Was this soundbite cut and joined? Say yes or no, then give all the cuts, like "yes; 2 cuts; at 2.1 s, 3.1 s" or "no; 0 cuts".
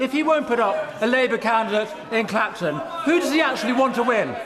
no; 0 cuts